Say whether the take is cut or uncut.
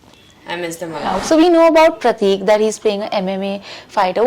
cut